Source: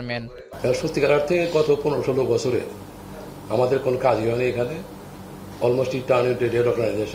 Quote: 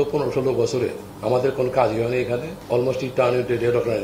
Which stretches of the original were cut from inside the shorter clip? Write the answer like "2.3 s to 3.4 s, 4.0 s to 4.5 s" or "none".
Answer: 2.8 s to 3.3 s, 4.8 s to 5.5 s